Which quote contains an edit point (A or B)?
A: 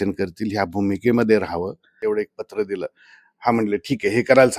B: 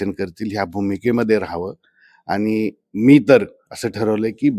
A